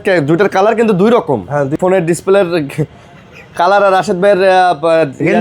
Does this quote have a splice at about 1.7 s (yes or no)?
yes